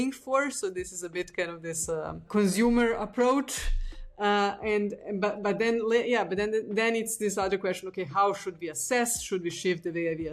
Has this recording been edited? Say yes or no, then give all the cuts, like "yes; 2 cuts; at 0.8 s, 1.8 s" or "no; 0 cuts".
yes; 1 cut; at 2.2 s